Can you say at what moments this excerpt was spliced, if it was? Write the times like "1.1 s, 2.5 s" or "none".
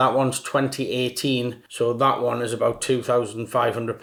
none